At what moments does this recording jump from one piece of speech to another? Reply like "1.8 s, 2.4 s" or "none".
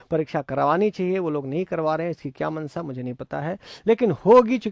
none